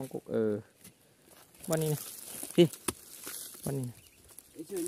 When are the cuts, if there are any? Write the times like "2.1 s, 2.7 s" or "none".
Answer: 1.6 s